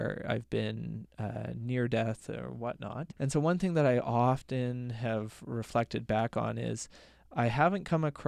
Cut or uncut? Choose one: cut